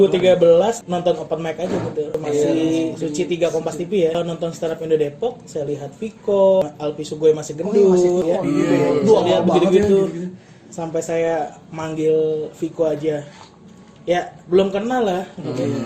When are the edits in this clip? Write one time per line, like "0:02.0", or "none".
0:00.8
0:02.1
0:04.2
0:06.6
0:08.2